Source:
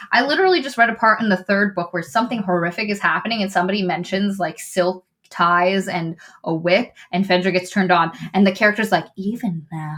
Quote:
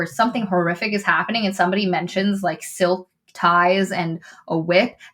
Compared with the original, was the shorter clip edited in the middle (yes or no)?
no